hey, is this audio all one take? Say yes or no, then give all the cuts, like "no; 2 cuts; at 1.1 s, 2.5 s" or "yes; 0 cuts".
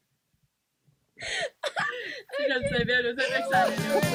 yes; 0 cuts